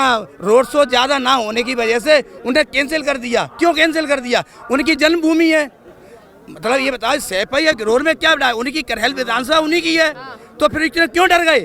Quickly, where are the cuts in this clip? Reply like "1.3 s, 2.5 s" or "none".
none